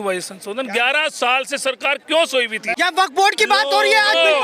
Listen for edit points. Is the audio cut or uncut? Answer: cut